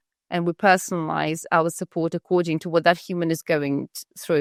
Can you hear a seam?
no; 0 cuts

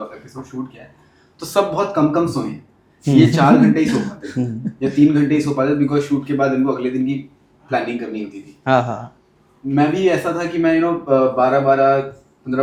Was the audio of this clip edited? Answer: no; 0 cuts

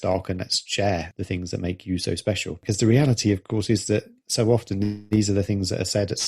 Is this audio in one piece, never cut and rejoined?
no; 2 cuts; at 1.1 s, 2.6 s

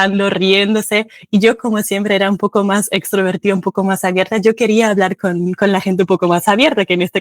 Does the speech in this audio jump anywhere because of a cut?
no; 0 cuts

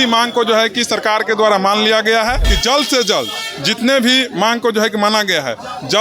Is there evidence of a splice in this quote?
yes; 1 cut; at 2.5 s

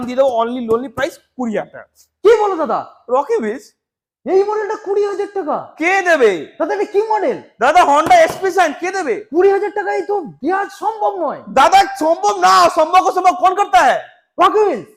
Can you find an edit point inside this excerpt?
no; 0 cuts

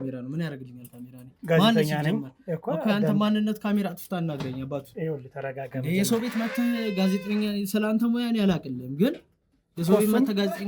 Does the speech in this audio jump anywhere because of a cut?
no; 0 cuts

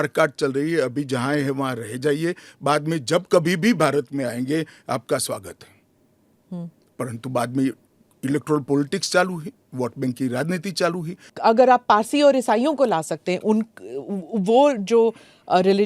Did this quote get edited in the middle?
yes; 1 cut; at 11.3 s

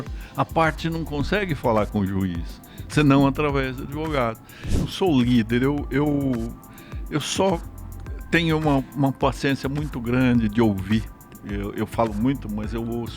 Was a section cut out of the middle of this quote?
yes; 1 cut; at 4.8 s

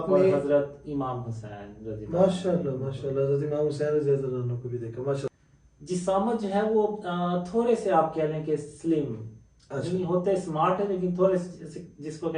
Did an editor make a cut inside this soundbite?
yes; 1 cut; at 5.3 s

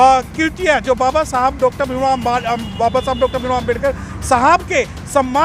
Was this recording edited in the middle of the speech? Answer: no; 0 cuts

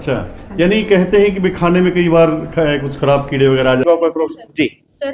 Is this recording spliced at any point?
yes; 1 cut; at 3.8 s

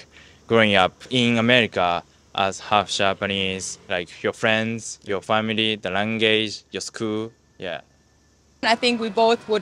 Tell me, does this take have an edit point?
yes; 3 cuts; at 1.0 s, 3.8 s, 8.6 s

